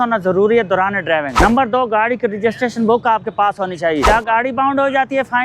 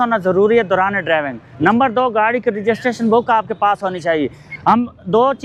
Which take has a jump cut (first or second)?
first